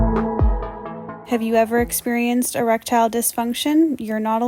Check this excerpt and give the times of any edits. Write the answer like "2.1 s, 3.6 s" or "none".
0.9 s

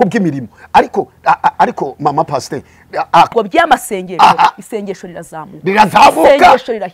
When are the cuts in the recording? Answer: 3.3 s

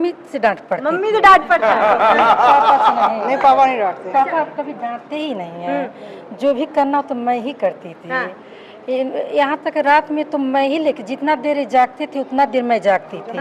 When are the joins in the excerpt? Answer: none

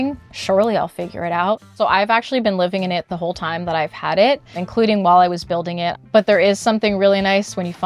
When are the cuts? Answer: 1.7 s, 4.6 s, 6.0 s

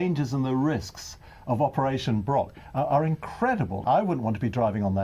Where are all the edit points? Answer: 3.8 s

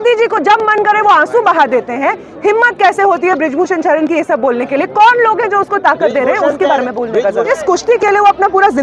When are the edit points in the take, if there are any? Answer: 7.5 s

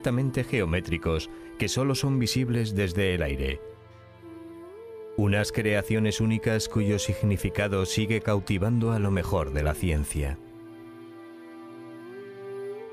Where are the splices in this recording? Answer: none

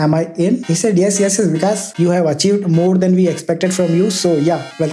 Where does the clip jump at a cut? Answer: 1.9 s

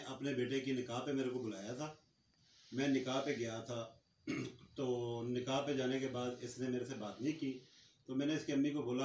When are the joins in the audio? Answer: none

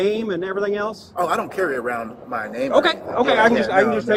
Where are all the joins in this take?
none

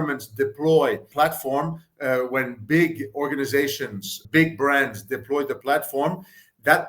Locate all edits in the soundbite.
1.1 s, 4.2 s

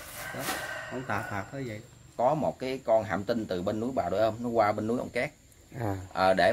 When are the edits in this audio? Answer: 2.1 s

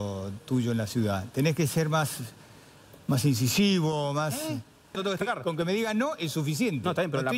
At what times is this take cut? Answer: 5.0 s

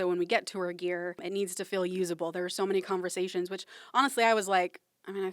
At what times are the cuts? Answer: 1.2 s

